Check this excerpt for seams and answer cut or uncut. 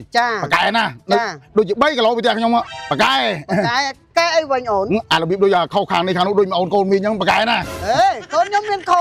uncut